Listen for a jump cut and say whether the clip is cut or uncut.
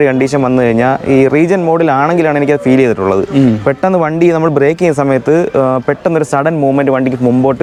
uncut